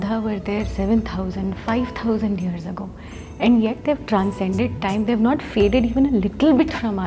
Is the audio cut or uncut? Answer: uncut